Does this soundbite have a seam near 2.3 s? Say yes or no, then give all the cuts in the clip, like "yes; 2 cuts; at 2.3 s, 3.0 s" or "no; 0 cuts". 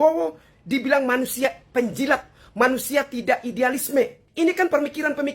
no; 1 cut; at 4.2 s